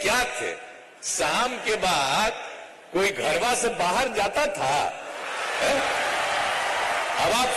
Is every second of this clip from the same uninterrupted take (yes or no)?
yes